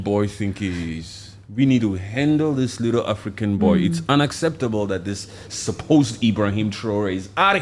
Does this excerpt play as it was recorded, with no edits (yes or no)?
yes